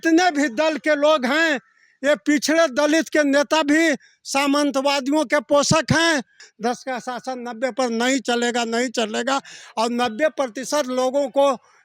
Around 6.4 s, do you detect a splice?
yes; 1 cut; at 6.4 s

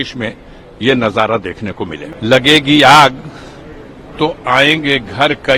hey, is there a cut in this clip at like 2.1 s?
yes; 1 cut; at 2.1 s

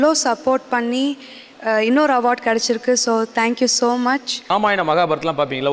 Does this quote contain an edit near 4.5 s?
yes; 1 cut; at 4.5 s

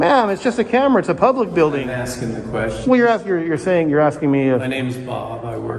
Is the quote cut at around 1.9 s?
yes; 1 cut; at 1.9 s

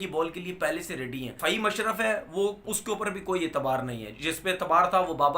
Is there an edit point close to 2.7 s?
yes; 2 cuts; at 1.3 s, 2.7 s

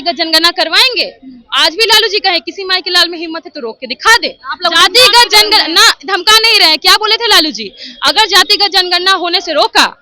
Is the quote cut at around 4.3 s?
no; 0 cuts

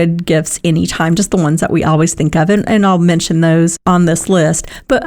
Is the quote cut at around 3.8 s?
yes; 1 cut; at 3.8 s

